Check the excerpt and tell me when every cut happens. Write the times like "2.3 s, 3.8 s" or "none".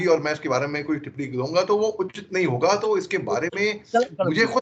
none